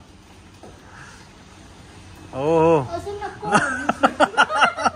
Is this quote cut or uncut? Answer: uncut